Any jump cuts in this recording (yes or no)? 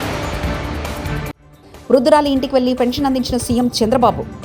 no